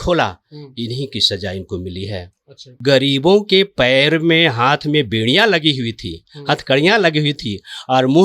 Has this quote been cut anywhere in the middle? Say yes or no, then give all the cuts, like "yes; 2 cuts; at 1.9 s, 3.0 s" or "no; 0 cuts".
yes; 1 cut; at 2.8 s